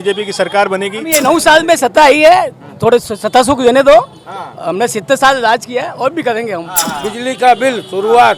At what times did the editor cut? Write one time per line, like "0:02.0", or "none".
0:01.1
0:06.8

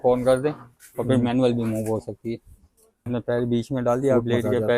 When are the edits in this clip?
0:03.1

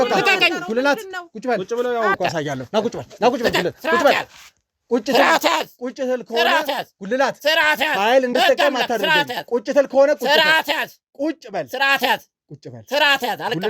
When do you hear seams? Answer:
0:02.2

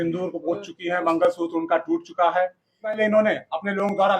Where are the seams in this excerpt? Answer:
0:03.0

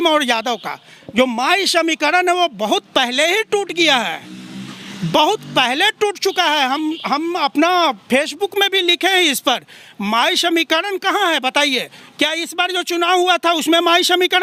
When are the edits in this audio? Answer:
none

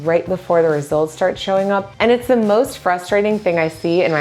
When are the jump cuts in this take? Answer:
none

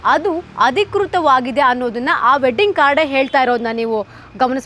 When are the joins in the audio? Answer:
none

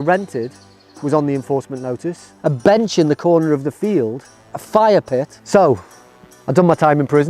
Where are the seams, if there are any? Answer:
0:02.3
0:05.4

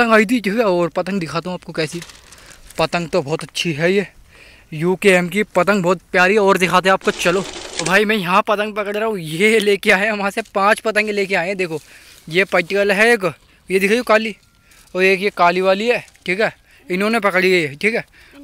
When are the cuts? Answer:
none

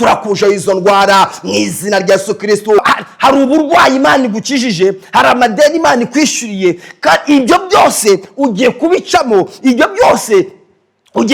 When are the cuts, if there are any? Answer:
0:02.8

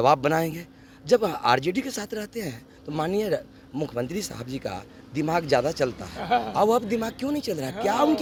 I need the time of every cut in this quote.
none

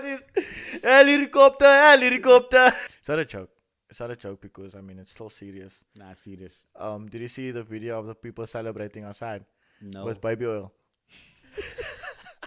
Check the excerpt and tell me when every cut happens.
0:02.9

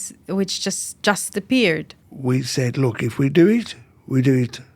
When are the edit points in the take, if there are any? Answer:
0:01.9

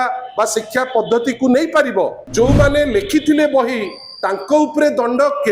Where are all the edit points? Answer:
0:02.2

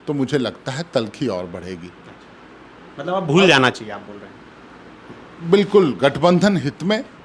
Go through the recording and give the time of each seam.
none

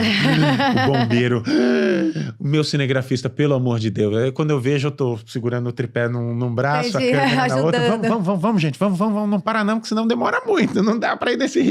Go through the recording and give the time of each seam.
none

